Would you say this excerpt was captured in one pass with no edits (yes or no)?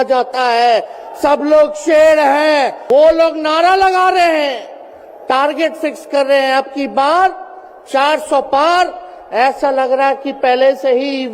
no